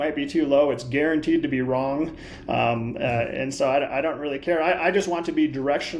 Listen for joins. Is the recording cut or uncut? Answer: uncut